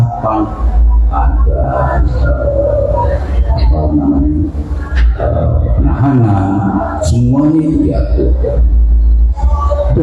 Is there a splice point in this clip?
no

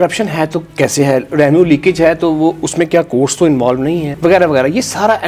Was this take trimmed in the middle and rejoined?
no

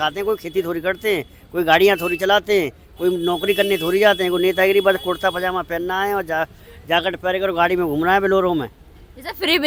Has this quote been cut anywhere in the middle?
no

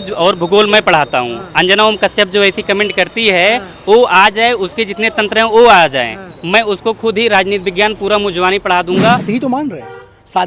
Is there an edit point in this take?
yes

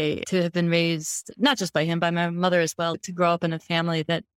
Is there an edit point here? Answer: no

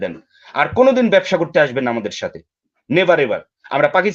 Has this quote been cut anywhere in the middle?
no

